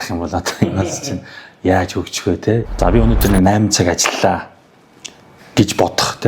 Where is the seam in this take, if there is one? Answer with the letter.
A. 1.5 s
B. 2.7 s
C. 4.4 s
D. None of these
B